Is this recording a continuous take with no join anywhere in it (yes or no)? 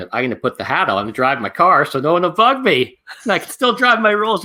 yes